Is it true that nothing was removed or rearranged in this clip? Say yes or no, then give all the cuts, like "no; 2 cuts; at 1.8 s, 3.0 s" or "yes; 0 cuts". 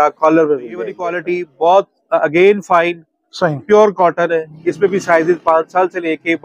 no; 1 cut; at 1.2 s